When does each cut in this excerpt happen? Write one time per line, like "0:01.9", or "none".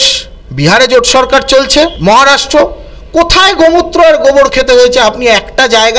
0:02.0

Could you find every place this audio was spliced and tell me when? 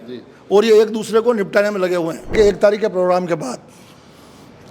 0:02.3

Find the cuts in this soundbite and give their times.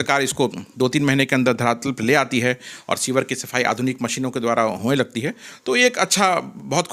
none

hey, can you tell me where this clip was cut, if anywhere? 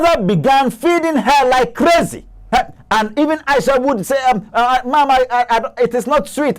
0:02.4

